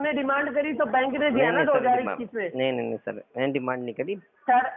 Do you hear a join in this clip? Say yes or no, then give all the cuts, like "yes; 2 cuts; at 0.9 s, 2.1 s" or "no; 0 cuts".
no; 0 cuts